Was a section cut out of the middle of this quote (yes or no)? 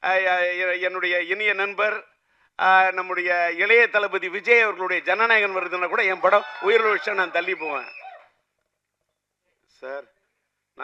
no